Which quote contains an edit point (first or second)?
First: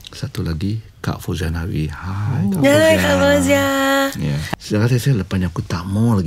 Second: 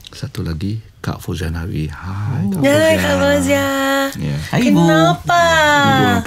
first